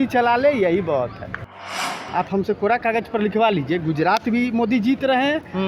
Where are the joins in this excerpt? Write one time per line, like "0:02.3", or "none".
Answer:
0:01.7